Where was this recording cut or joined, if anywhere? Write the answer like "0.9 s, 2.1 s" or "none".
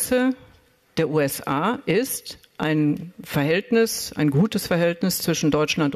none